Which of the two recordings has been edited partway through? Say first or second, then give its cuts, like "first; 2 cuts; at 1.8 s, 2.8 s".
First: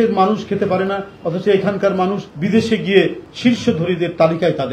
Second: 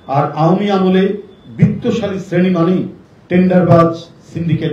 first; 2 cuts; at 2.3 s, 3.2 s